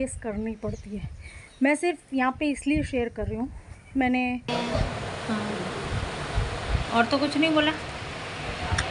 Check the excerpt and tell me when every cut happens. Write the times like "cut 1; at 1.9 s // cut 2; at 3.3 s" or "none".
cut 1; at 4.5 s